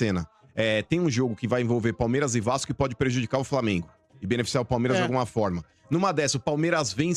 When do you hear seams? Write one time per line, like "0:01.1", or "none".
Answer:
none